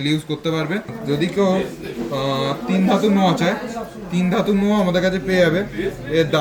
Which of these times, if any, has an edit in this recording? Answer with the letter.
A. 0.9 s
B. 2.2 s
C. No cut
A